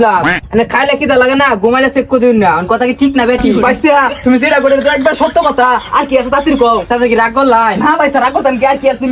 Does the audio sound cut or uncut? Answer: uncut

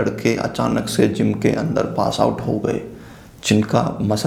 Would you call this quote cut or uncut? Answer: uncut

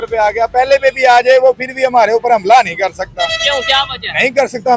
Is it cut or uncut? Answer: uncut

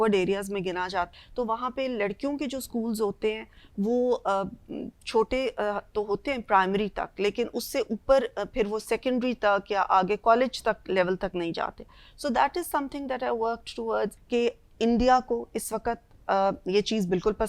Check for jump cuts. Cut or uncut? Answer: cut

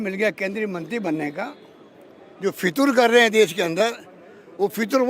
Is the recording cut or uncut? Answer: uncut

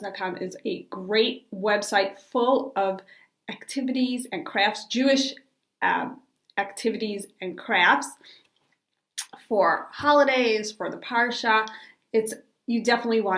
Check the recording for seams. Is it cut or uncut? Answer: cut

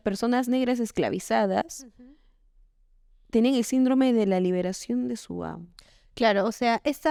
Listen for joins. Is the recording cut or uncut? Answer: uncut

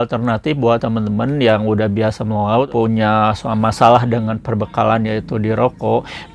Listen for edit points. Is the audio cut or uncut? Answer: cut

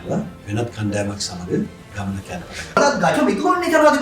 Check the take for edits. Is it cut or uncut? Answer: cut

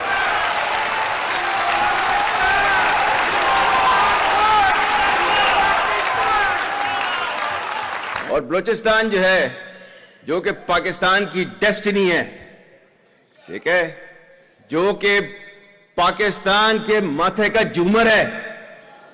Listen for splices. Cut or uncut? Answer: uncut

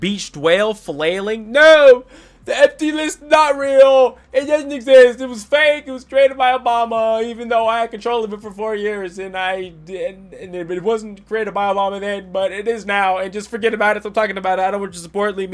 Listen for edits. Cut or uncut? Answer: uncut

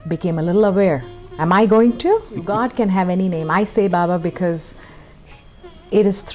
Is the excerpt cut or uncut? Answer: cut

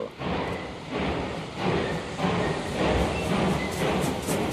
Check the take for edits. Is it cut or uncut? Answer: cut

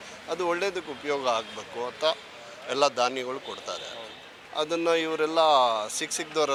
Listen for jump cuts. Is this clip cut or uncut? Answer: uncut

